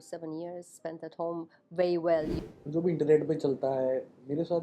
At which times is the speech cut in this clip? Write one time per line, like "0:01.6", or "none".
0:02.4